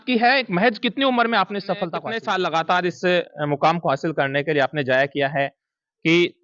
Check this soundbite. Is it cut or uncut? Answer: cut